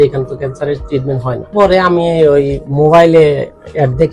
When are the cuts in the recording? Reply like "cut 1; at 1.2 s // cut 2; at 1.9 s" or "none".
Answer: cut 1; at 1.5 s